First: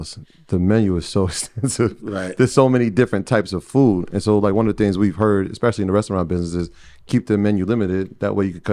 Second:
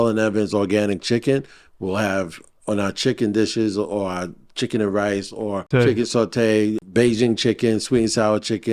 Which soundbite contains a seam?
second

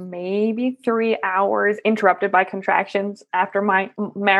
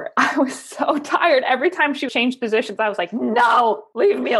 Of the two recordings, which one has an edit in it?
second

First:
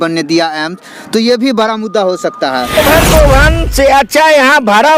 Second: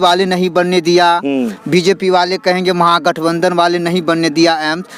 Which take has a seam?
first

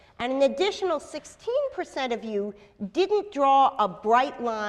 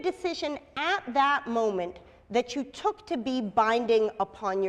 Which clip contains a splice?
second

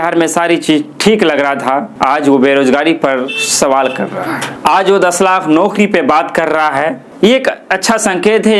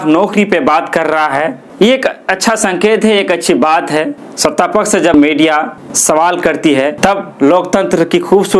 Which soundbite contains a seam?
second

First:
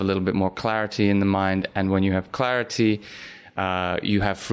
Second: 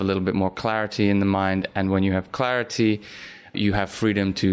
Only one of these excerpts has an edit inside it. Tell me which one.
second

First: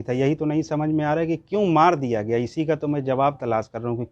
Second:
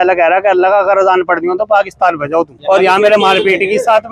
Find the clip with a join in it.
second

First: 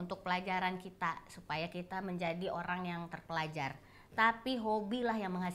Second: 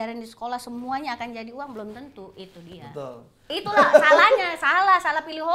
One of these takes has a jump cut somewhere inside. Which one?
second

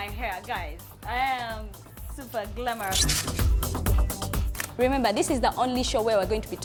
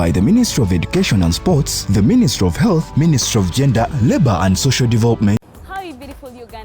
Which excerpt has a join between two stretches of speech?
second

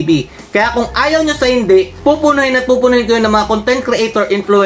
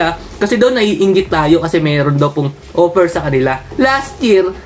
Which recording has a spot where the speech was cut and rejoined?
second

